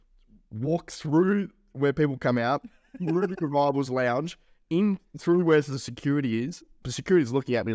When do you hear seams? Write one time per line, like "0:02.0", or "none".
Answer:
0:06.7

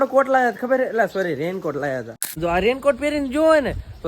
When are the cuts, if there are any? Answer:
0:02.1

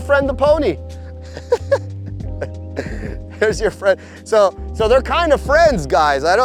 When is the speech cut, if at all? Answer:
none

